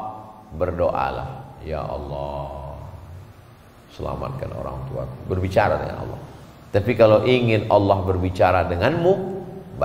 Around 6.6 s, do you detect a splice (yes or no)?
no